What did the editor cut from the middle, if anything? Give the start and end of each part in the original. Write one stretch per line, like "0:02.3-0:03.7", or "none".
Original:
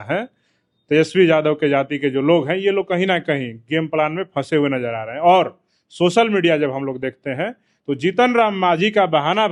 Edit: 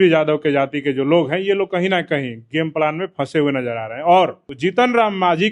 0:05.6-0:07.9